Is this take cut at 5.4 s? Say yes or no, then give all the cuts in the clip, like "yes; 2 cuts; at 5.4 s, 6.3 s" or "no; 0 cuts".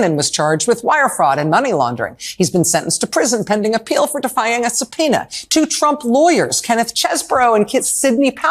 yes; 1 cut; at 5.4 s